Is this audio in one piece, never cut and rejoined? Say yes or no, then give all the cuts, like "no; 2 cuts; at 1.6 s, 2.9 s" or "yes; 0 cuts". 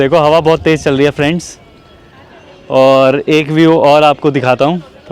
yes; 0 cuts